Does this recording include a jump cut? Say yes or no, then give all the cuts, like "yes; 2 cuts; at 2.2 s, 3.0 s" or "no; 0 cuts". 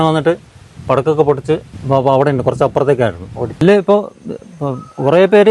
yes; 2 cuts; at 1.7 s, 3.6 s